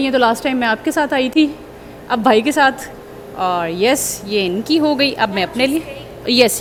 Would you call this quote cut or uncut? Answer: uncut